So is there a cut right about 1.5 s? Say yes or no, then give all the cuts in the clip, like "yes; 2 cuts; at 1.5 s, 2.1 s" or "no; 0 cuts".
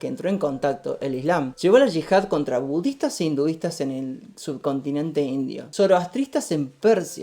yes; 2 cuts; at 1.5 s, 5.6 s